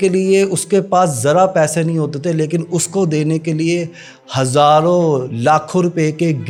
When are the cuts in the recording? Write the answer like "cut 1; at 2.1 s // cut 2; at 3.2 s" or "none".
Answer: none